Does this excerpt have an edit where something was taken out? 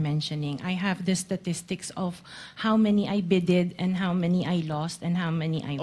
no; 0 cuts

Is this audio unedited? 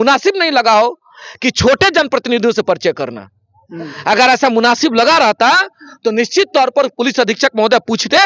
yes; 0 cuts

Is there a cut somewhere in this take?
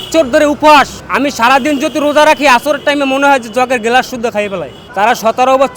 yes; 2 cuts; at 1.0 s, 4.8 s

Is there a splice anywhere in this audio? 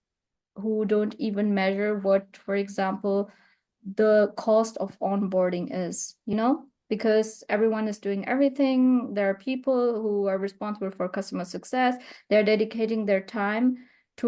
no; 0 cuts

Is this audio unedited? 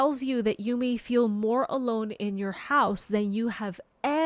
yes; 0 cuts

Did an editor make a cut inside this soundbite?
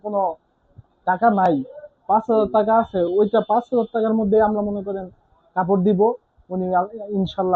no; 0 cuts

